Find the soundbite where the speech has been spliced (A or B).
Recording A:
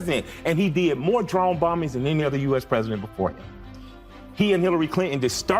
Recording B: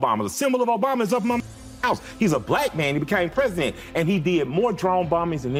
A